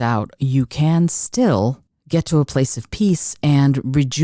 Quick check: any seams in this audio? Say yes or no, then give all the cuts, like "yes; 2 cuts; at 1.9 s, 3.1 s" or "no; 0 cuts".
no; 0 cuts